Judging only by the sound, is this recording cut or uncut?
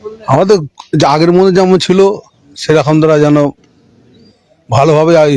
uncut